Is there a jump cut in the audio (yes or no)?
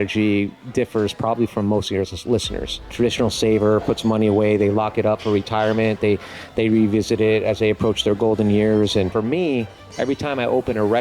yes